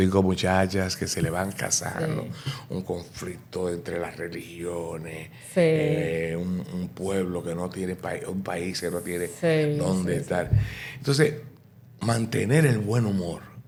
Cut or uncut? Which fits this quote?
uncut